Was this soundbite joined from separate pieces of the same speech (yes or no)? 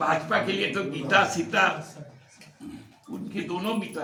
no